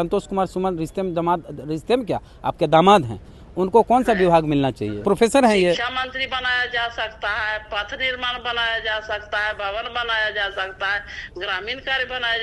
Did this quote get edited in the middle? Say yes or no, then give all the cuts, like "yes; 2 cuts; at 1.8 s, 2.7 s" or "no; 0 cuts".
yes; 1 cut; at 4.9 s